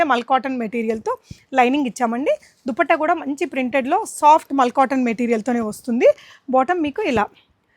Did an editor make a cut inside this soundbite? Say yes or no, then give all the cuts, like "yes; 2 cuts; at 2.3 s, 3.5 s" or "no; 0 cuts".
no; 0 cuts